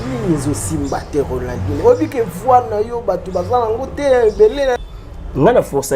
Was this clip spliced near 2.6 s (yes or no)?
no